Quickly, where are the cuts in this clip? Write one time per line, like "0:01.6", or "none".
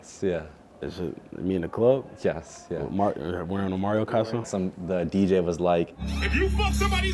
0:04.1